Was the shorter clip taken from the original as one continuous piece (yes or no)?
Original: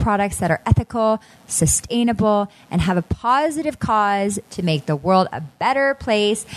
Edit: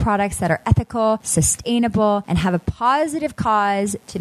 no